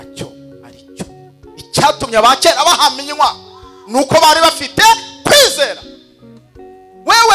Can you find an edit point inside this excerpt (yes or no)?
no